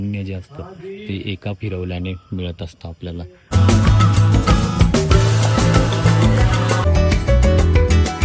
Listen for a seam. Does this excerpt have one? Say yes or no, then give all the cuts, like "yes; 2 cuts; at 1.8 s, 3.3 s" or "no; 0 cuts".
yes; 2 cuts; at 3.5 s, 6.8 s